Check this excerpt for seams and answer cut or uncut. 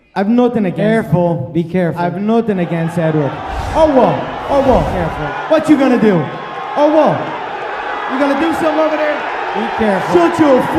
cut